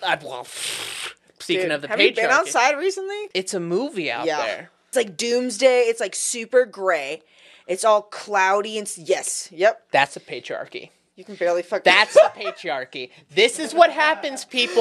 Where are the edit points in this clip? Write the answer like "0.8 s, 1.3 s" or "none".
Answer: 3.2 s, 4.9 s, 9.8 s